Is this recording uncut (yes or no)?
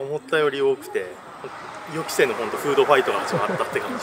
yes